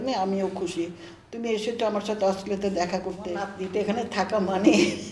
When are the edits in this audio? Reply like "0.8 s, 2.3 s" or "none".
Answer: 3.5 s